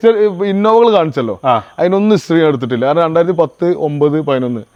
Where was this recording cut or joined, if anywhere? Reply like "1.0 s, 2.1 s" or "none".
none